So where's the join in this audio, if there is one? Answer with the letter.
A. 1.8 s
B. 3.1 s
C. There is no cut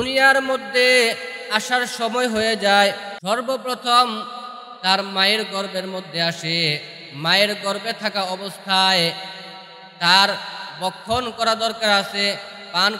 B